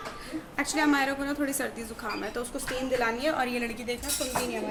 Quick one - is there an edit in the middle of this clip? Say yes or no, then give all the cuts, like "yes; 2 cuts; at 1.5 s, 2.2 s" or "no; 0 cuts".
no; 0 cuts